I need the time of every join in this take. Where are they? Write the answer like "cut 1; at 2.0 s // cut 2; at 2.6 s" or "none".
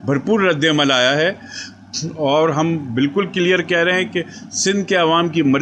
none